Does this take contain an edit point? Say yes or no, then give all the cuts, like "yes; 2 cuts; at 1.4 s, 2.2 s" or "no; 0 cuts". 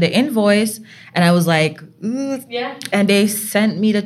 no; 0 cuts